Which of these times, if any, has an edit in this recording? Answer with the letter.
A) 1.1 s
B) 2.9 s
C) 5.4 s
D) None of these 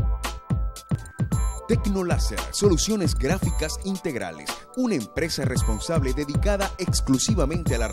A